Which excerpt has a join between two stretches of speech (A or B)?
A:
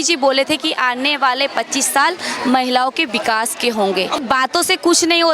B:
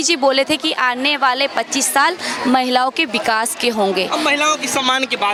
A